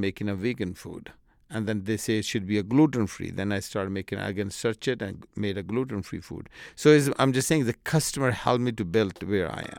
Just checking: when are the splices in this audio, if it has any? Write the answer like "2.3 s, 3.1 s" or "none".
none

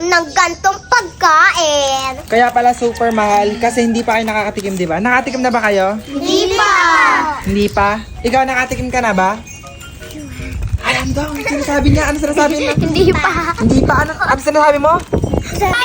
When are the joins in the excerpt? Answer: none

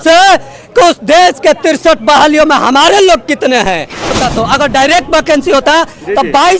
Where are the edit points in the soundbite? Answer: 4.1 s

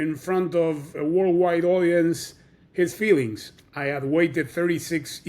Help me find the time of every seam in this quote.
3.7 s

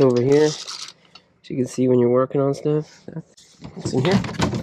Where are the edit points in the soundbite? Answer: 3.4 s

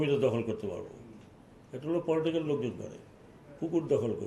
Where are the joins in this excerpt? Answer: none

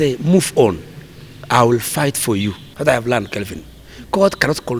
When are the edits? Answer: 2.7 s

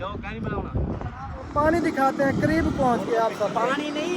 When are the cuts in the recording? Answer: 1.5 s

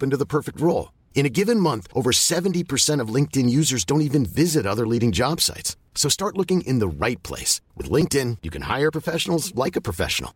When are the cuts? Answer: none

